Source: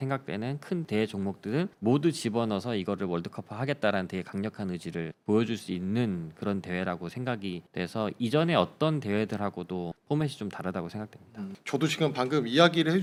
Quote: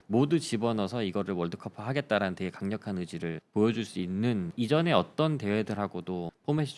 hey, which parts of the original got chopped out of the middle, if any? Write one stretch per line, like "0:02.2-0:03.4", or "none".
0:06.2-0:08.1